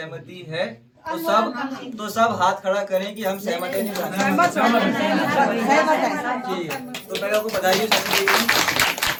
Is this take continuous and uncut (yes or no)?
yes